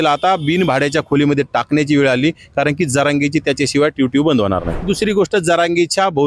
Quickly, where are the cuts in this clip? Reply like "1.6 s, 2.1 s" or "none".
4.8 s